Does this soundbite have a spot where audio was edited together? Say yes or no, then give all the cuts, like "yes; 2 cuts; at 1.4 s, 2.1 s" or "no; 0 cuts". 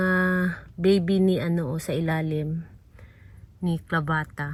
no; 0 cuts